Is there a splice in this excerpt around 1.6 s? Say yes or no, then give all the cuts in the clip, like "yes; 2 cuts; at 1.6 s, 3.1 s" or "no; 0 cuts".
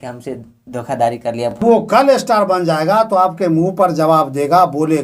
yes; 1 cut; at 1.6 s